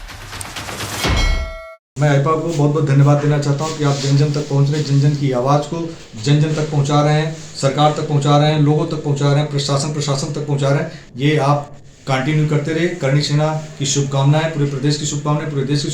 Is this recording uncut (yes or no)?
no